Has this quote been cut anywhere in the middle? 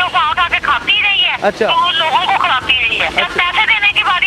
yes; 2 cuts; at 1.3 s, 3.1 s

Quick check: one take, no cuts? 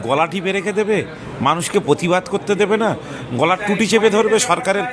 yes; 0 cuts

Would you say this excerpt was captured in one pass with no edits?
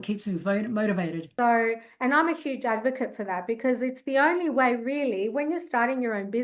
no; 1 cut; at 1.2 s

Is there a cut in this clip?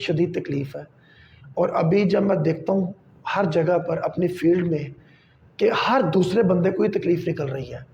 no; 0 cuts

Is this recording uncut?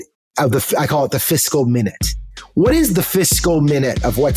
yes; 0 cuts

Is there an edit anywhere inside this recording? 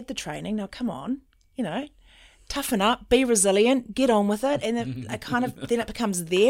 no; 0 cuts

